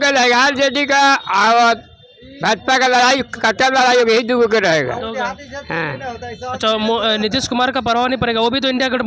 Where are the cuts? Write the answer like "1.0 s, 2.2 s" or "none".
none

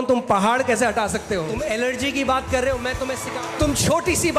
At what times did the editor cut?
1.5 s, 3.2 s

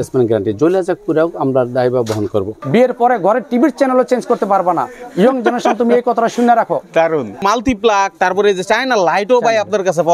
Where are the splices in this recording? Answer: 2.6 s, 7.4 s

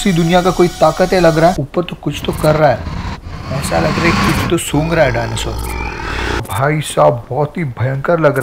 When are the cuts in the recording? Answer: 1.6 s, 6.5 s

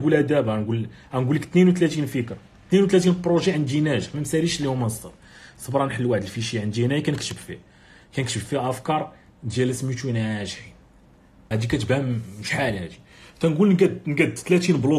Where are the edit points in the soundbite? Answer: 11.5 s

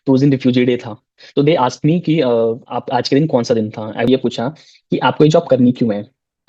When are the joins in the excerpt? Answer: 4.1 s

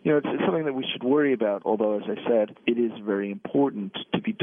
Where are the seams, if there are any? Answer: 2.6 s

